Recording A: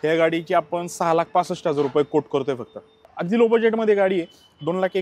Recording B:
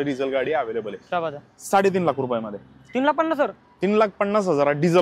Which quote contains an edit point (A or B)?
A